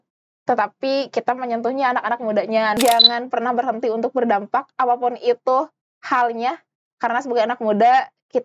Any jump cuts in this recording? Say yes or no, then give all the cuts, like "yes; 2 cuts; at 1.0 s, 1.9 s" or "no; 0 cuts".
yes; 1 cut; at 2.8 s